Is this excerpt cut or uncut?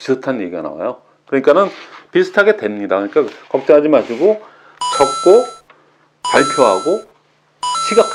uncut